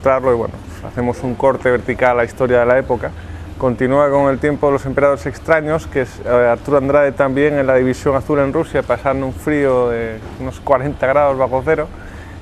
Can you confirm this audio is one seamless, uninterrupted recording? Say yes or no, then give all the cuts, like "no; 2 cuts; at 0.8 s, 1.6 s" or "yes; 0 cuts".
no; 1 cut; at 3.9 s